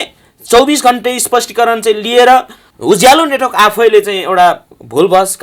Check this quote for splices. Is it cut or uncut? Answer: cut